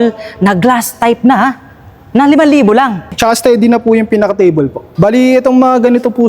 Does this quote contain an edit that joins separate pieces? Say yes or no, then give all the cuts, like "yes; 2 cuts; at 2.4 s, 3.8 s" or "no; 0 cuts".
yes; 2 cuts; at 3.1 s, 4.9 s